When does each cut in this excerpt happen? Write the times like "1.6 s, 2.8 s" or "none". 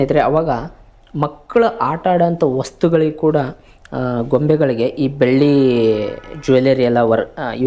none